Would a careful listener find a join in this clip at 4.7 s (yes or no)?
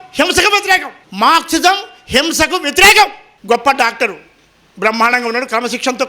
no